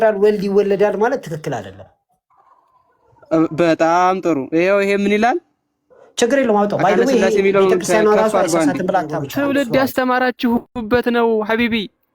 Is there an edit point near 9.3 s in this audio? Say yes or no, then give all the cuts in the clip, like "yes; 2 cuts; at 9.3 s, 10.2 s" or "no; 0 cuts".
yes; 1 cut; at 9.3 s